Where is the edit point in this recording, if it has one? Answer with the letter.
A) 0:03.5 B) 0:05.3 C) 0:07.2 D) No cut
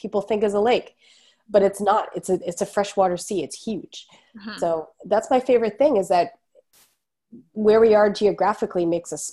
D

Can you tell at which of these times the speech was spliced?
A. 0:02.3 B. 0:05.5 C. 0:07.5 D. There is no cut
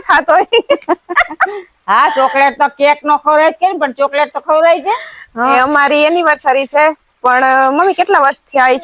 B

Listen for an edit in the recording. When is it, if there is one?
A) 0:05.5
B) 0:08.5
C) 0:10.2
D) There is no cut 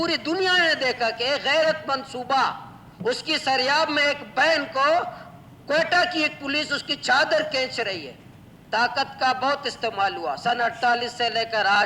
B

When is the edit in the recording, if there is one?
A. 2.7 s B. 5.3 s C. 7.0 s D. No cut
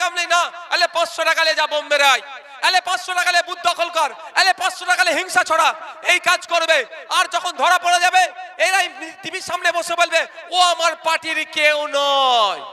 D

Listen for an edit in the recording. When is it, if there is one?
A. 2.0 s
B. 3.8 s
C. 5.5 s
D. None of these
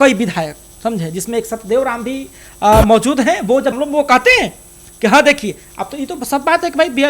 B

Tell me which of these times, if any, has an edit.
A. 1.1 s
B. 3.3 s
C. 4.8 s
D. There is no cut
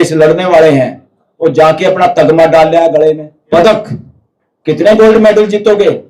B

